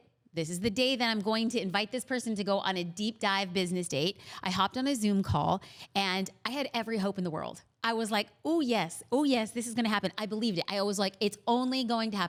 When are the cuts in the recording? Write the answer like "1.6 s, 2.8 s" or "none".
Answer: none